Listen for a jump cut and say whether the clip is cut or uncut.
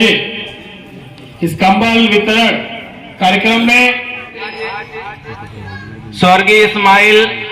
cut